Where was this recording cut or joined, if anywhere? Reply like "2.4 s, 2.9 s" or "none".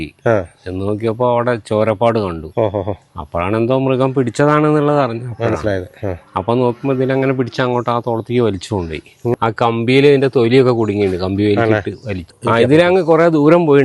9.3 s, 12.4 s